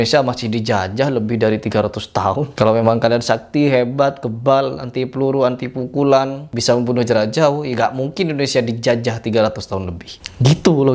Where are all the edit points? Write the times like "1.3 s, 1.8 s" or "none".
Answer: none